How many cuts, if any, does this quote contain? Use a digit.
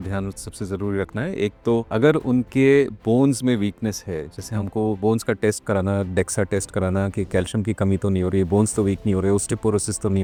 0